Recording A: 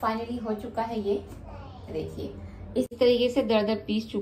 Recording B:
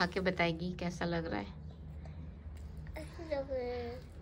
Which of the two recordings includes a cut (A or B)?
A